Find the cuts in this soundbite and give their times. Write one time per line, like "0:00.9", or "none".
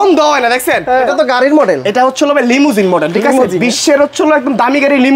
0:01.0